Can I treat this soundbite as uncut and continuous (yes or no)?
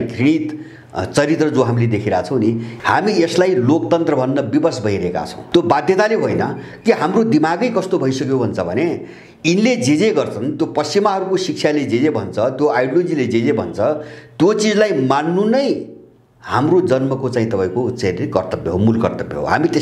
no